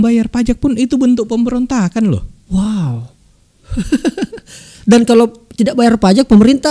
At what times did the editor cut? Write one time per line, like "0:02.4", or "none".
none